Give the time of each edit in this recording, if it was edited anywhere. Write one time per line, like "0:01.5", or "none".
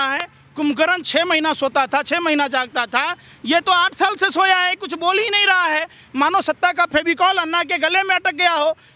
none

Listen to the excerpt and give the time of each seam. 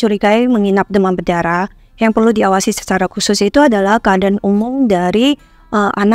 none

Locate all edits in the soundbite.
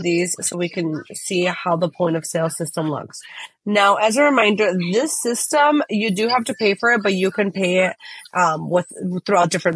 0:03.4

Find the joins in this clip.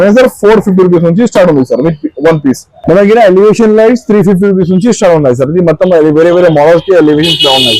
0:02.7

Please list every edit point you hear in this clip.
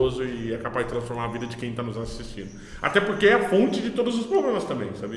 none

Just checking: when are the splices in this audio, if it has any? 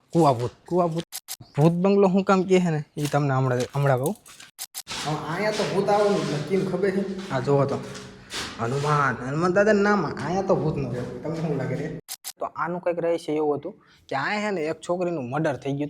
0:01.2
0:04.5
0:12.3

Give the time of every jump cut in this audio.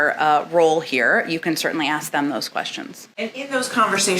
0:03.1

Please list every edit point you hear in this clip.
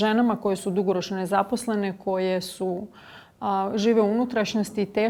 none

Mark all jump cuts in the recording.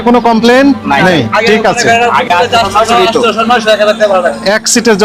none

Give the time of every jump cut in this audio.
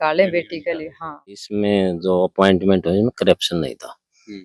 0:01.5

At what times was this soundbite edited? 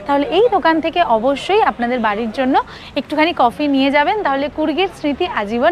none

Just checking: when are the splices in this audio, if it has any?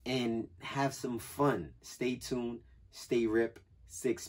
none

